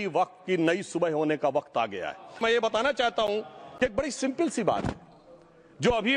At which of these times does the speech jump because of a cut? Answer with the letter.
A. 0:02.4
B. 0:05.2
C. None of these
A